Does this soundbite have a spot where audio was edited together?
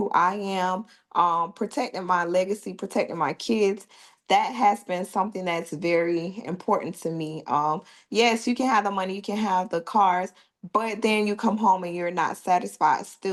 no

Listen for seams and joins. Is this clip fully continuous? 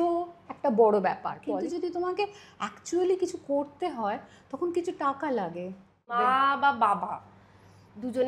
no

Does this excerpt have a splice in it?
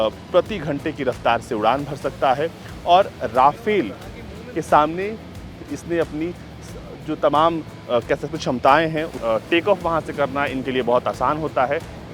yes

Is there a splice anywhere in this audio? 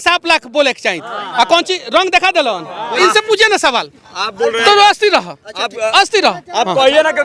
yes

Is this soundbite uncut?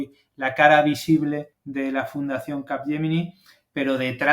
no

